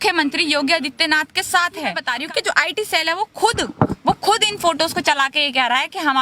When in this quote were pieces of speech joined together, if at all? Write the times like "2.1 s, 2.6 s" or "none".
2.1 s